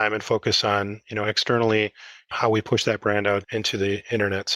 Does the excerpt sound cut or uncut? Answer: uncut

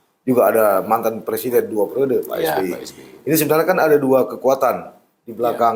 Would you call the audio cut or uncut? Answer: uncut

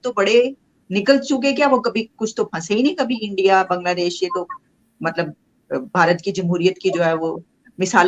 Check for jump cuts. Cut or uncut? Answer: uncut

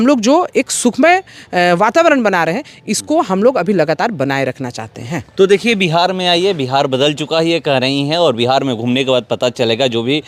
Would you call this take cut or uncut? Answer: uncut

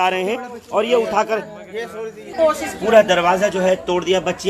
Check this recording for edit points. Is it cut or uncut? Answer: cut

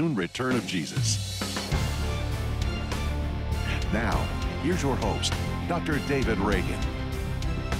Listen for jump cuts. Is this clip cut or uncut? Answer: cut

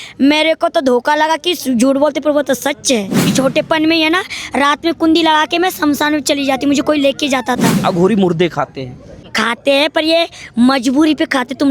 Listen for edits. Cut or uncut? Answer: cut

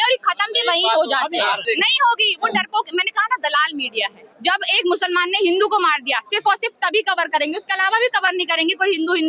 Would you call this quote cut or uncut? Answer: cut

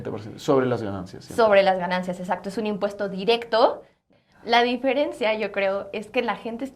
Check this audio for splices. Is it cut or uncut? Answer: cut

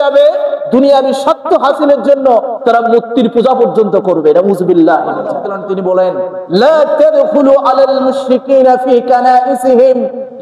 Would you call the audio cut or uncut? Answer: cut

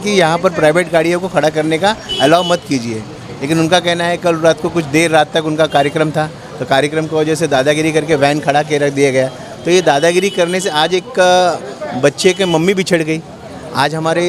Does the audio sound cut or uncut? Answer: uncut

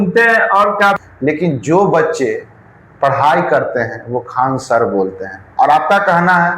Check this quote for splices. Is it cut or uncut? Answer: cut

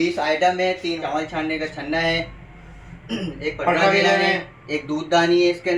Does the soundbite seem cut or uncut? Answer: cut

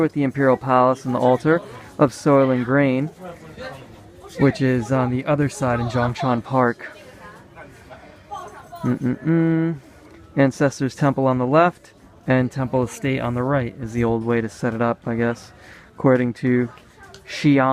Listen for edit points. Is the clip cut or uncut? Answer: uncut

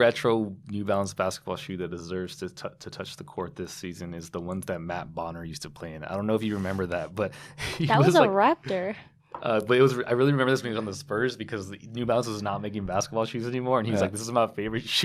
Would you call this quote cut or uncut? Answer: uncut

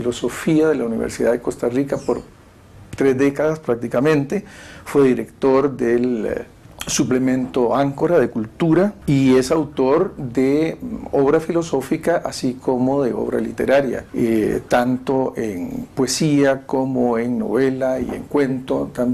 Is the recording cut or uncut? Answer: cut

